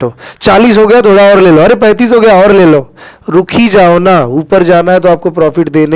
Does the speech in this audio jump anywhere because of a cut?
no; 0 cuts

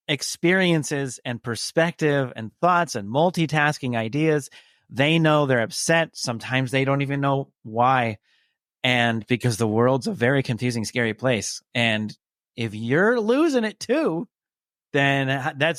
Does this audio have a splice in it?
no; 0 cuts

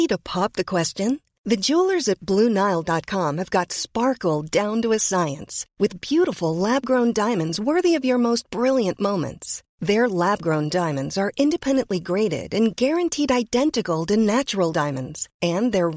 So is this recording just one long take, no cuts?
yes; 0 cuts

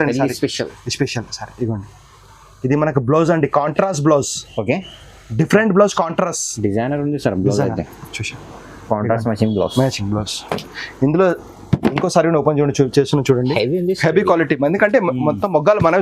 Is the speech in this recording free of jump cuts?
no; 1 cut; at 13.5 s

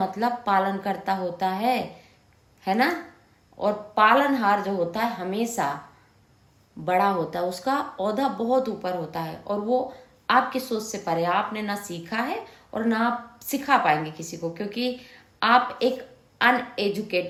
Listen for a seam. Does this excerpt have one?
no; 0 cuts

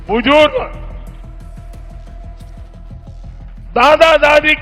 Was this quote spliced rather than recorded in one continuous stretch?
yes; 2 cuts; at 1.4 s, 3.7 s

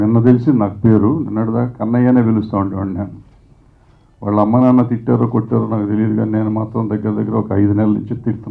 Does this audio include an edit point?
no; 0 cuts

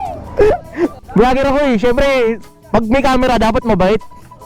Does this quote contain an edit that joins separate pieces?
yes; 1 cut; at 1.0 s

